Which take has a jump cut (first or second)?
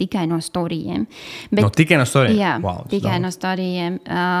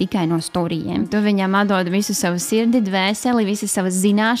second